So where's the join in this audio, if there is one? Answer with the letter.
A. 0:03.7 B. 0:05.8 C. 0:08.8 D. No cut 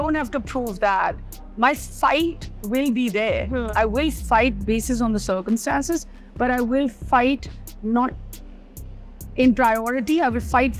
D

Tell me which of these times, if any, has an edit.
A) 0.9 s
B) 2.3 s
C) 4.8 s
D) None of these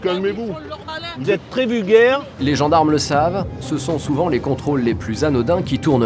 B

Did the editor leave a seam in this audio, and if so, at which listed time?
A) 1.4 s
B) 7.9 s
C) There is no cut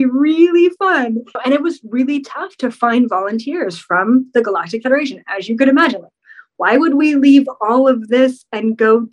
A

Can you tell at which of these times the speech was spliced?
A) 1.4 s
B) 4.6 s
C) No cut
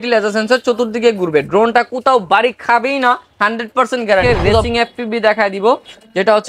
B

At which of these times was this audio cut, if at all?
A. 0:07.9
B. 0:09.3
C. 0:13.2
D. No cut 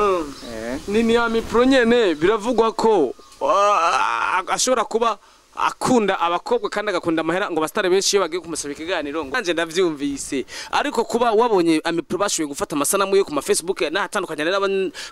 B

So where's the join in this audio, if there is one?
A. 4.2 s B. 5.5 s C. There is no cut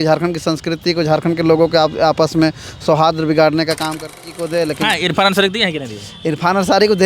A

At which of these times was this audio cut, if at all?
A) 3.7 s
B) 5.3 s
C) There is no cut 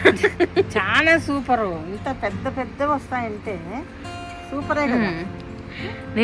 C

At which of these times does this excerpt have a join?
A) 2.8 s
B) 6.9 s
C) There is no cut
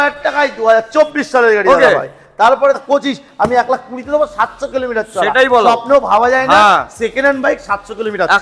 A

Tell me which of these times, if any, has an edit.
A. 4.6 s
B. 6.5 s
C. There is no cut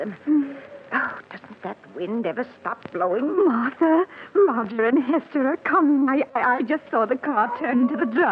B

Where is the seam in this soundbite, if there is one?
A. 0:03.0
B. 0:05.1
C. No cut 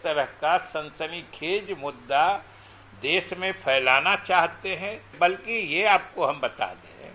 B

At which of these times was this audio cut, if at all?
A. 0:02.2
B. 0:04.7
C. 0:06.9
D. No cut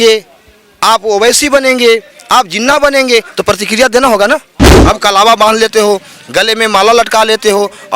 B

